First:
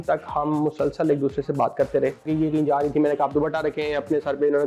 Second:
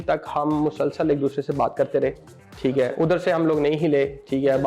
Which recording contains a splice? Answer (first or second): first